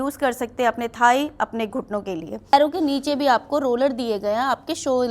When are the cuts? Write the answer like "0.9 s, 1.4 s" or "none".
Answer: 2.5 s